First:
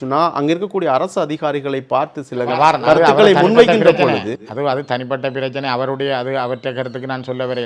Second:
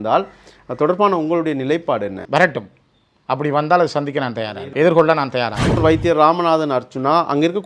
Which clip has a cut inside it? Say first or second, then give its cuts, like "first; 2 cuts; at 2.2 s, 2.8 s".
second; 3 cuts; at 2.2 s, 4.6 s, 5.7 s